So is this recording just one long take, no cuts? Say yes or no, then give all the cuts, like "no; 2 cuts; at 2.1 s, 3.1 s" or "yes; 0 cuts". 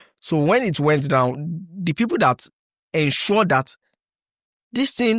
yes; 0 cuts